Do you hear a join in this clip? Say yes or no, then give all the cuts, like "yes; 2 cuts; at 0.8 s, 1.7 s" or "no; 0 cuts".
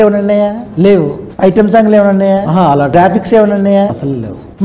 no; 0 cuts